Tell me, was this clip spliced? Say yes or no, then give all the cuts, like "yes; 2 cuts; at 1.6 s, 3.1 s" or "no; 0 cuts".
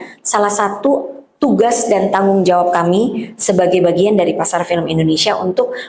no; 0 cuts